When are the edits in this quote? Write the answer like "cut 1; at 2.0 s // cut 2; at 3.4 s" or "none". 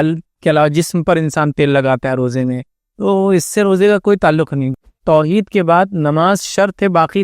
cut 1; at 4.9 s